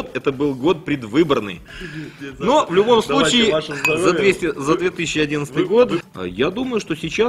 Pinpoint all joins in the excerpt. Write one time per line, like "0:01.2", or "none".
0:06.0